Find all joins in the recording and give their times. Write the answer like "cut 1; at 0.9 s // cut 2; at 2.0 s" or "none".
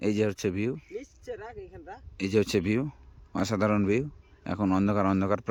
none